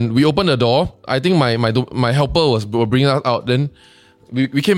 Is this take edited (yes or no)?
no